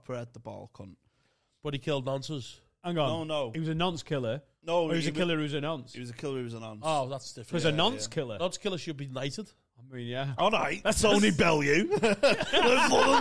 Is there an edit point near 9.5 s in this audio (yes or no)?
no